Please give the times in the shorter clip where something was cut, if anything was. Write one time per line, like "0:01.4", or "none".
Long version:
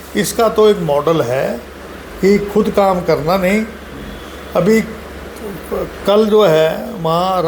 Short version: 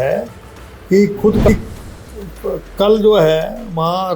0:01.5